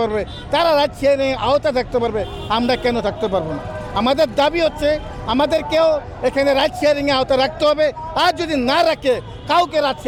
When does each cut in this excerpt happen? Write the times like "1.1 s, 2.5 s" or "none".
none